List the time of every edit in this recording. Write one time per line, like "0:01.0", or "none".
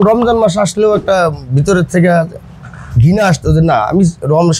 none